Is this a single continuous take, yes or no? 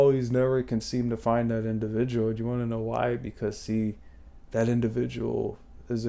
yes